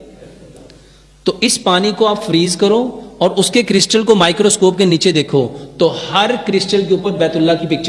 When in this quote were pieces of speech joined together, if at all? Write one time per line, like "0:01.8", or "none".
none